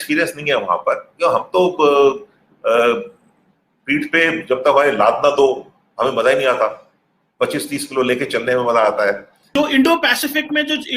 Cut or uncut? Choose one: cut